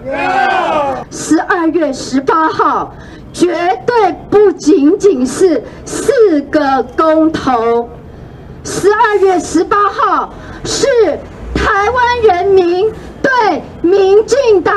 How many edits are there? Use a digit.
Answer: 1